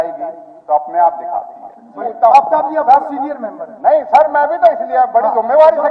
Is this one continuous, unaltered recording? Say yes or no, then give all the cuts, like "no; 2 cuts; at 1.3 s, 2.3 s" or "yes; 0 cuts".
no; 1 cut; at 2.0 s